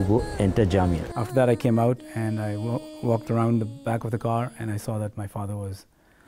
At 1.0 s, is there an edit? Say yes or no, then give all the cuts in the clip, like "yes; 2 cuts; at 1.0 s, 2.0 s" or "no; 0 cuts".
yes; 1 cut; at 1.0 s